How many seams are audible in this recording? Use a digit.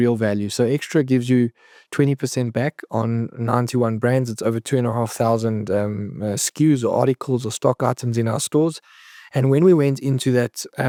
0